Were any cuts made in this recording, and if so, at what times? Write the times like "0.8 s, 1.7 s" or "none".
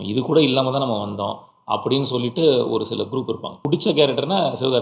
3.6 s

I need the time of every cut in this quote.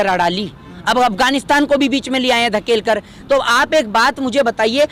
none

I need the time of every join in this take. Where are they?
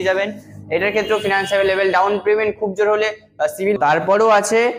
3.8 s

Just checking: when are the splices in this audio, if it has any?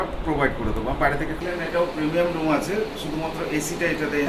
1.4 s

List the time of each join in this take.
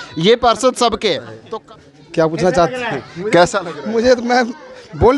1.3 s

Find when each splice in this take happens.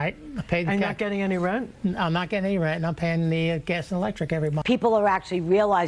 4.6 s

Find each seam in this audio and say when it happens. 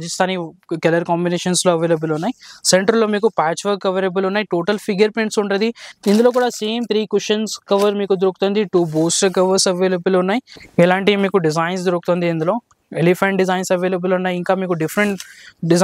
5.9 s, 10.6 s

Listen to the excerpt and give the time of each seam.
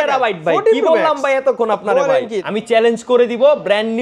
2.4 s

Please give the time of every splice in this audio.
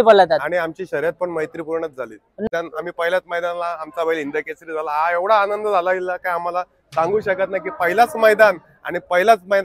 2.5 s

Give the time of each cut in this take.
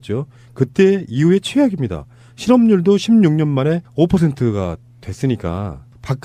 none

